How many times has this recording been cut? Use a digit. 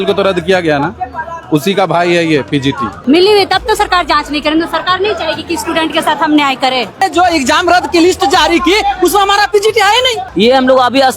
3